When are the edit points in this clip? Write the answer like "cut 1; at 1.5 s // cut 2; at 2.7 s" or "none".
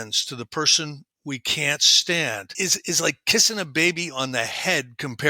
cut 1; at 2.5 s

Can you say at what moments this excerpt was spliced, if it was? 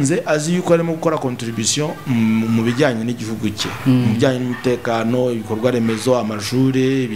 none

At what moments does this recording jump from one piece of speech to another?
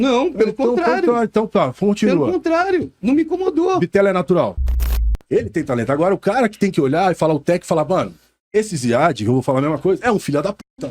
cut 1; at 4.7 s

